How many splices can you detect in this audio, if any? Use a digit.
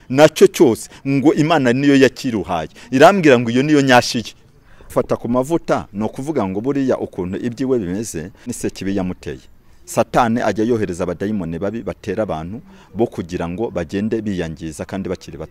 2